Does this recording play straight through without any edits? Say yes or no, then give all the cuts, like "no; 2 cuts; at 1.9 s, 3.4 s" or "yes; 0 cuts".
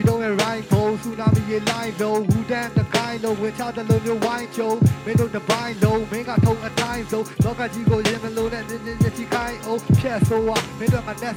yes; 0 cuts